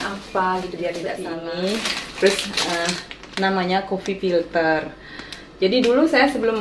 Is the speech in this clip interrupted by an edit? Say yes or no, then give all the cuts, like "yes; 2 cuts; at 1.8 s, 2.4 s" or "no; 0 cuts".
yes; 1 cut; at 1.3 s